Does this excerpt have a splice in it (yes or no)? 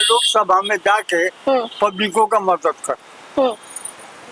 no